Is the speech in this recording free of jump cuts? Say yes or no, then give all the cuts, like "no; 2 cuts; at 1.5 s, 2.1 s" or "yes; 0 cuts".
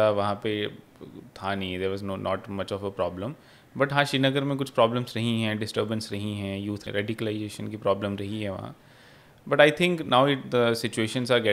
no; 1 cut; at 6.8 s